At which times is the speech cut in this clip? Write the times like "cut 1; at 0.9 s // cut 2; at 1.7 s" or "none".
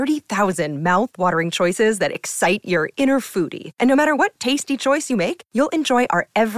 none